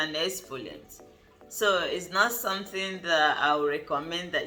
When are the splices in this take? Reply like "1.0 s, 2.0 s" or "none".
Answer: none

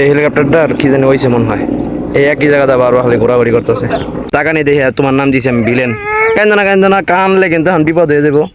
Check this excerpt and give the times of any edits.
4.3 s

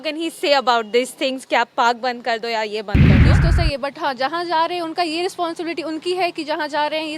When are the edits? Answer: 2.9 s, 3.5 s

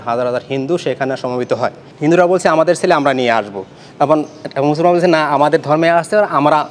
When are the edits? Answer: 1.9 s

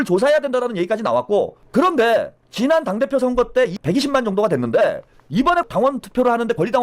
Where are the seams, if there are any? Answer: 1.6 s, 2.4 s, 3.8 s, 5.5 s

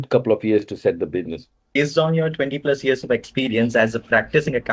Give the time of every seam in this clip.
1.8 s

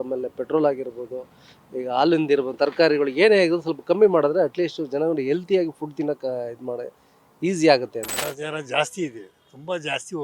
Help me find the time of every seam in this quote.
8.1 s

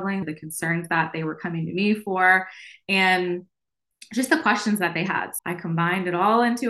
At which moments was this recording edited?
5.3 s

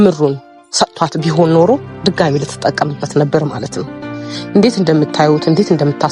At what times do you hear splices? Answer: none

